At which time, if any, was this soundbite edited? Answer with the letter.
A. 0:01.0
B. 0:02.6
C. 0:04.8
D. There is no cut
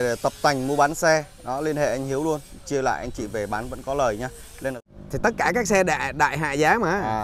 C